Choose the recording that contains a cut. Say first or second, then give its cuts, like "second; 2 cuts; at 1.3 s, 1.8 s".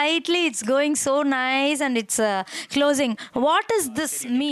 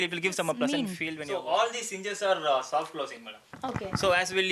second; 1 cut; at 1.0 s